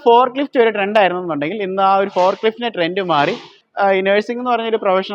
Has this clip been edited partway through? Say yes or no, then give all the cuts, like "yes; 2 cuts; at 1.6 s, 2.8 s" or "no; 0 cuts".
yes; 1 cut; at 3.6 s